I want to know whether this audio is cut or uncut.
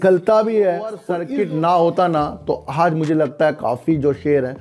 cut